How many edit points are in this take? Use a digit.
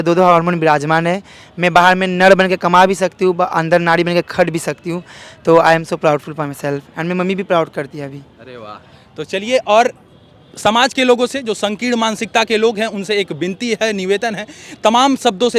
0